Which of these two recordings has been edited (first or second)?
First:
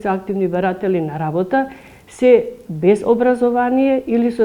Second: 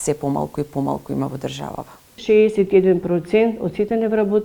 second